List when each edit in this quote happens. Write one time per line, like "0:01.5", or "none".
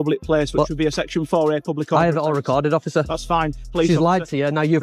0:03.6